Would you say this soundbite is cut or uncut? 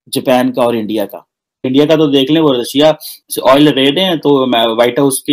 cut